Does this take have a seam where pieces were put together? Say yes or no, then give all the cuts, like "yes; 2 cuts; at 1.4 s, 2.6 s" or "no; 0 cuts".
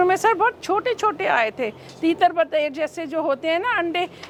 no; 0 cuts